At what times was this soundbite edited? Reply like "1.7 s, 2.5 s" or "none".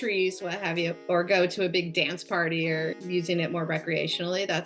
3.0 s